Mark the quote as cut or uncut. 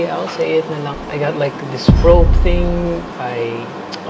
cut